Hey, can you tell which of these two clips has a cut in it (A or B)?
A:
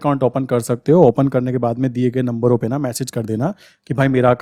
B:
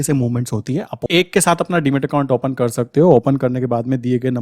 B